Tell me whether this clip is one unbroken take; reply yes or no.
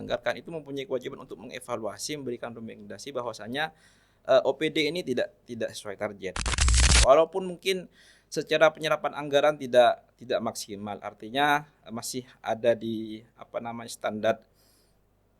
no